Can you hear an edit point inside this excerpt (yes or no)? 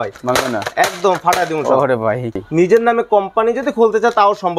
yes